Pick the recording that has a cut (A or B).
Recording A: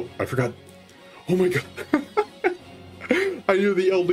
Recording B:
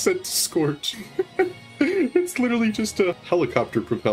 B